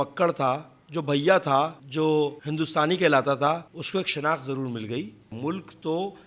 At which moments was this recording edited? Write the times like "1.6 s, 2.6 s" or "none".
1.8 s, 2.4 s, 3.7 s, 5.3 s